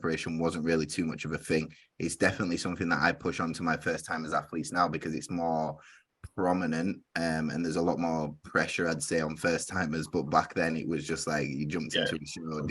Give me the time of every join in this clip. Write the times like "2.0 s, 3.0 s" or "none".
none